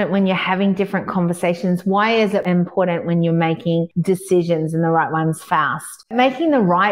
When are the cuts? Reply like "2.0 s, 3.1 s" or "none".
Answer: 2.4 s, 3.9 s, 6.1 s